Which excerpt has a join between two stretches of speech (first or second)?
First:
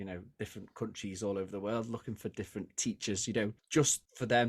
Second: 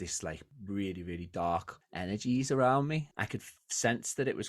second